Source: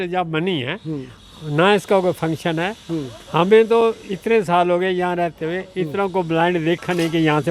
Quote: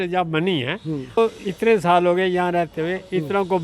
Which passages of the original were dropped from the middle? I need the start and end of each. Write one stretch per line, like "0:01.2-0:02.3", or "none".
0:01.2-0:03.8